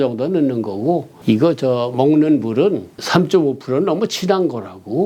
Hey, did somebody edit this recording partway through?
yes; 2 cuts; at 1.1 s, 3.0 s

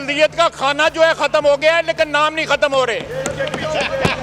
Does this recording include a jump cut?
no; 0 cuts

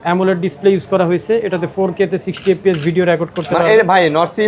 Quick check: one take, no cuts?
yes; 0 cuts

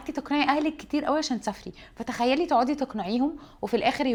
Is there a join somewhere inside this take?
no; 0 cuts

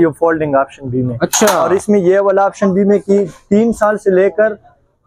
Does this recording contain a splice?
no; 0 cuts

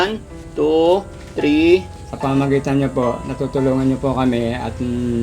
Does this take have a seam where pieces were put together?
yes; 1 cut; at 2.0 s

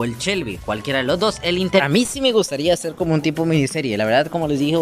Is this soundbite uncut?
no; 1 cut; at 1.8 s

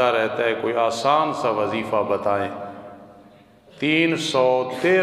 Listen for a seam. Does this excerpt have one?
no; 0 cuts

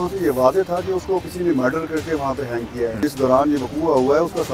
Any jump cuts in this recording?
yes; 1 cut; at 3.0 s

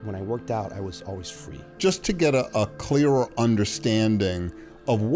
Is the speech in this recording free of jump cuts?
no; 1 cut; at 1.7 s

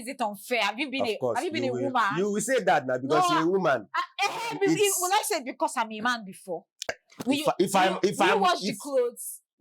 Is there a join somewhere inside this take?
yes; 1 cut; at 7.0 s

